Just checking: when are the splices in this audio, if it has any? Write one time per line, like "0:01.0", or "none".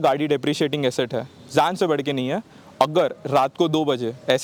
none